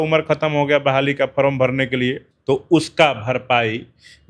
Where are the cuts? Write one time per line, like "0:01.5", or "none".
0:02.3